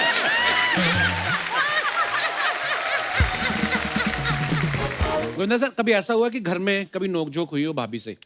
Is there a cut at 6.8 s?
no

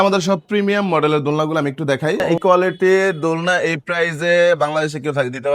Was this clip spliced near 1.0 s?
no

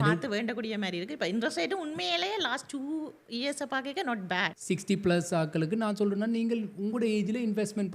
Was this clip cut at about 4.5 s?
yes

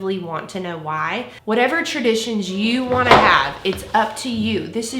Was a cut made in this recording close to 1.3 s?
yes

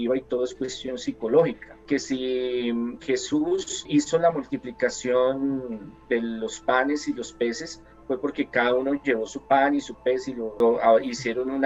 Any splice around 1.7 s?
yes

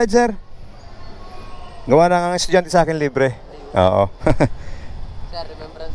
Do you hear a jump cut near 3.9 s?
yes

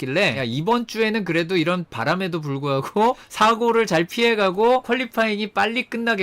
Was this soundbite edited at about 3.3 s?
no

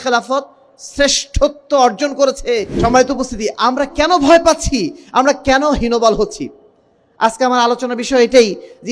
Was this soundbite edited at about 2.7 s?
yes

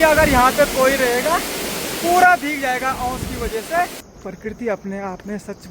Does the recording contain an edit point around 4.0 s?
yes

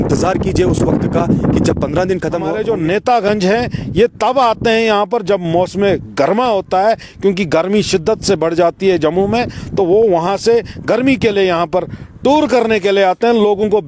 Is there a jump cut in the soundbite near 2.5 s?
yes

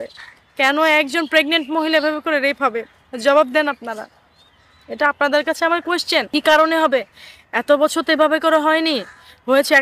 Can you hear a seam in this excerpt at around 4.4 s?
no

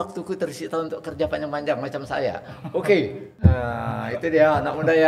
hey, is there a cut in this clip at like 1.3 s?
no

